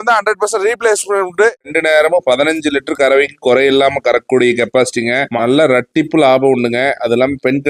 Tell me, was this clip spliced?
yes; 2 cuts; at 1.7 s, 5.3 s

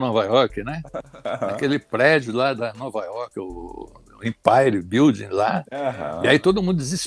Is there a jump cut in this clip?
no; 0 cuts

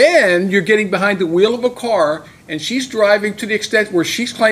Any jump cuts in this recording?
no; 0 cuts

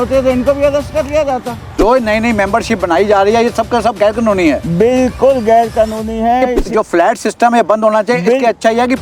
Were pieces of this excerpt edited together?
yes; 2 cuts; at 1.7 s, 6.6 s

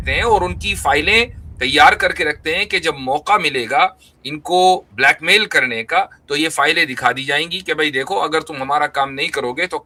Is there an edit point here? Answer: no; 0 cuts

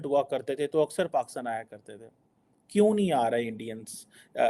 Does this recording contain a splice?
no; 0 cuts

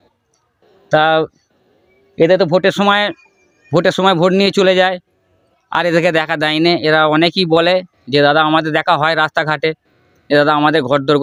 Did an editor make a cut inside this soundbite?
no; 0 cuts

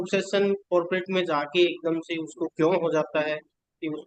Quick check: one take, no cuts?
yes; 0 cuts

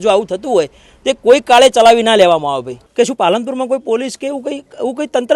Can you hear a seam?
yes; 1 cut; at 2.8 s

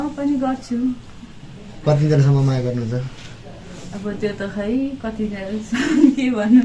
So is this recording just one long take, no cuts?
yes; 0 cuts

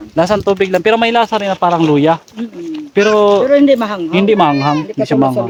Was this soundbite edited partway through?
no; 0 cuts

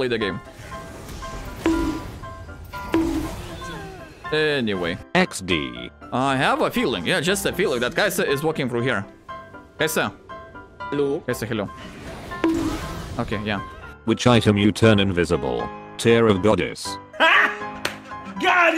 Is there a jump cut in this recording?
yes; 3 cuts; at 5.0 s, 5.9 s, 14.0 s

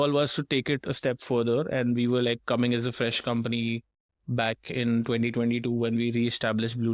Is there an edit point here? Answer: no; 0 cuts

